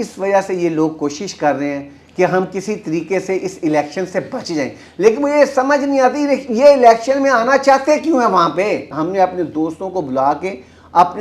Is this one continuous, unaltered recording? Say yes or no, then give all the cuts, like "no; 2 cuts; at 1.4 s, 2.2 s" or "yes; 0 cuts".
no; 1 cut; at 9.0 s